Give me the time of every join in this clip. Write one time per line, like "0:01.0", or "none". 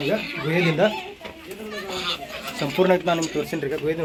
none